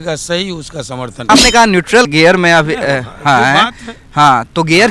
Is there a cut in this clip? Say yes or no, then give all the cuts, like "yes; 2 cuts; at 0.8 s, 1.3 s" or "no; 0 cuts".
yes; 1 cut; at 1.3 s